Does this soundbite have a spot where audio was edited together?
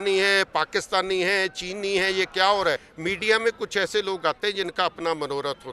yes; 1 cut; at 2.9 s

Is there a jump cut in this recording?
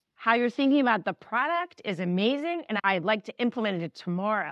yes; 1 cut; at 2.8 s

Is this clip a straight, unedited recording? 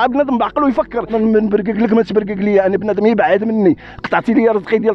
no; 1 cut; at 1.1 s

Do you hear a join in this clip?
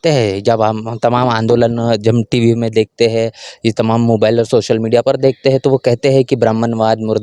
no; 0 cuts

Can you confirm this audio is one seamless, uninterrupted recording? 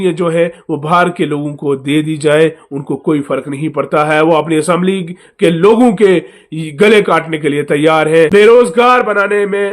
no; 1 cut; at 8.5 s

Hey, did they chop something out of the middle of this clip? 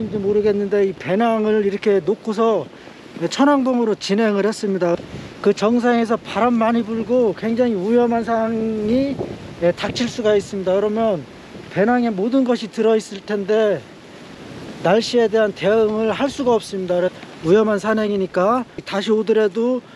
yes; 3 cuts; at 5.0 s, 17.1 s, 18.9 s

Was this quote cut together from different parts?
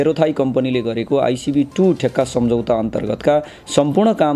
no; 0 cuts

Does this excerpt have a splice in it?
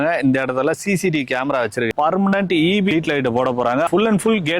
yes; 3 cuts; at 1.9 s, 2.9 s, 3.9 s

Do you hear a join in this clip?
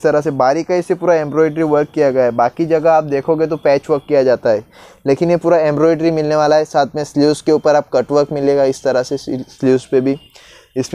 no; 0 cuts

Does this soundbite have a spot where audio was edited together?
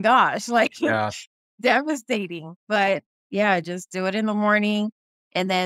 no; 0 cuts

